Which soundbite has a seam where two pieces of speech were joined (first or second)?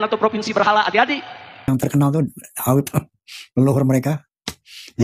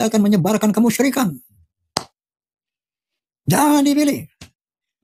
first